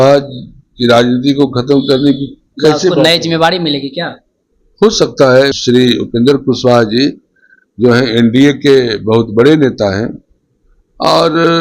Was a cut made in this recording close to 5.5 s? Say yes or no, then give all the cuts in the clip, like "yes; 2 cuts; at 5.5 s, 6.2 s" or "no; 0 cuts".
yes; 1 cut; at 5.5 s